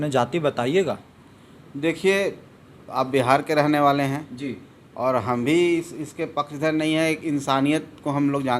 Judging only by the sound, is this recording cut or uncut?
uncut